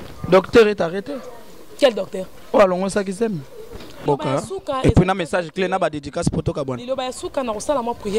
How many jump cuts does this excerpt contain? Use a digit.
1